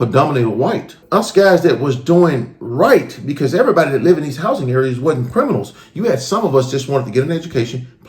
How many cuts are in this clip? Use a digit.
1